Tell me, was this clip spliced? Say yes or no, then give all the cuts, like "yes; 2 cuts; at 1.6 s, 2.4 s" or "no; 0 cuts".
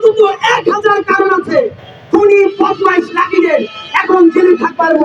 no; 0 cuts